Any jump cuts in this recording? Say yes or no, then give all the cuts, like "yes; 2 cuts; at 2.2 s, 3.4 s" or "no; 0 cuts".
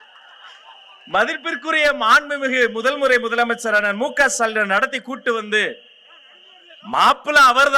no; 0 cuts